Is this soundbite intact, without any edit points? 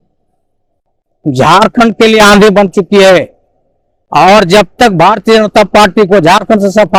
yes; 0 cuts

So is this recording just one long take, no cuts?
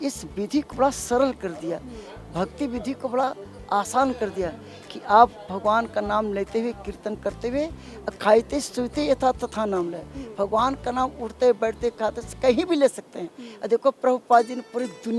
yes; 0 cuts

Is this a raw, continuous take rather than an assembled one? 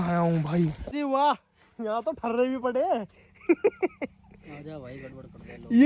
no; 1 cut; at 0.9 s

